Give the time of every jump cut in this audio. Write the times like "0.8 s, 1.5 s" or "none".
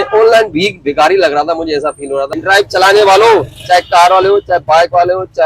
2.3 s

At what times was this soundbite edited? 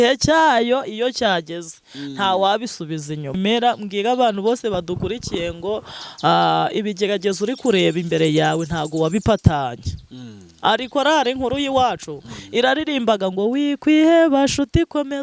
3.4 s

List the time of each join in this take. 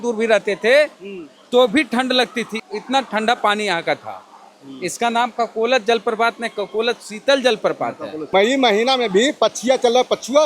8.3 s

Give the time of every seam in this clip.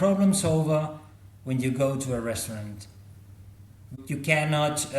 4.0 s

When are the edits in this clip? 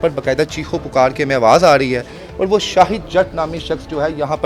none

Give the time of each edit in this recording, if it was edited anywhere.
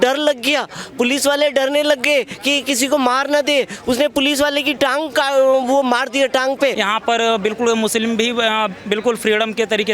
6.8 s

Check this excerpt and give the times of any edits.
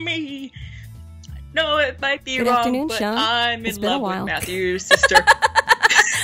4.8 s

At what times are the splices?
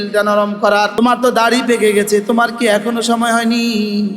0.9 s

